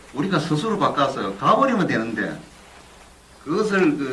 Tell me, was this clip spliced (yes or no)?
yes